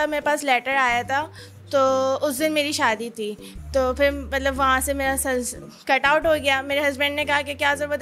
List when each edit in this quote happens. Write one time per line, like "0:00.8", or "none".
none

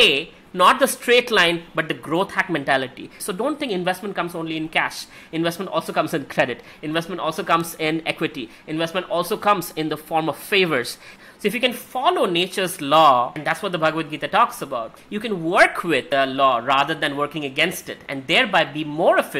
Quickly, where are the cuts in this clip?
0:03.2
0:11.1
0:13.4
0:16.0

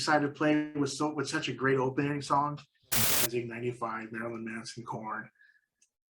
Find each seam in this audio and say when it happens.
0:02.8

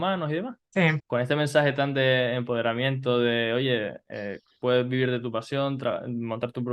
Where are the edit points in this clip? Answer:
0:00.9

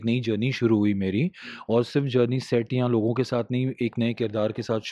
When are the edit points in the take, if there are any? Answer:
none

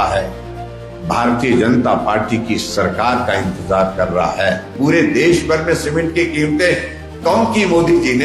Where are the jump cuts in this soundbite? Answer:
0:04.7

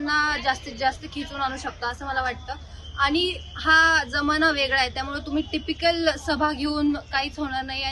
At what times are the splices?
none

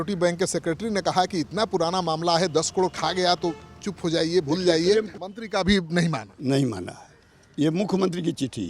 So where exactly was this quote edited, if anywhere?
0:05.2

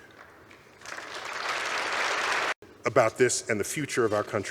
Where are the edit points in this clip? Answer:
0:02.6

